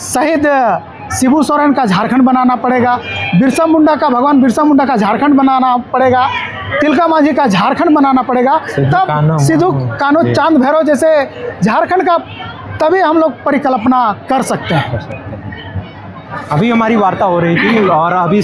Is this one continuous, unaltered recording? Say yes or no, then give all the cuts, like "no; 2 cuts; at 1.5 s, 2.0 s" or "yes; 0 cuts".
yes; 0 cuts